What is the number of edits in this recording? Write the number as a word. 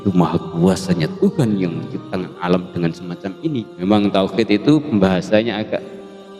one